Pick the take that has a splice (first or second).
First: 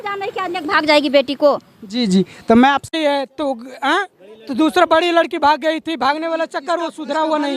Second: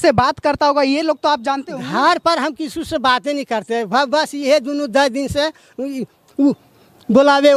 first